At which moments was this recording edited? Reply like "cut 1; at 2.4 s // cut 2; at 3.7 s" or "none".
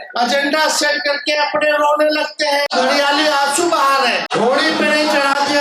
cut 1; at 2.7 s // cut 2; at 4.3 s